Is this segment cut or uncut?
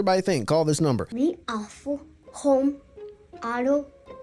cut